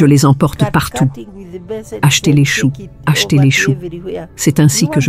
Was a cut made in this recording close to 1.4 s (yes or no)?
yes